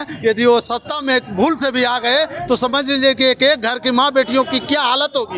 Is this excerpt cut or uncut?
uncut